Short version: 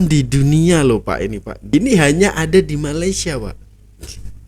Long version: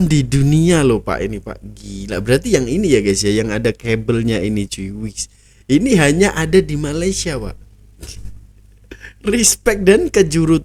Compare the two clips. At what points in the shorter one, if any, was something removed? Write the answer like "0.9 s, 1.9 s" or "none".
1.5 s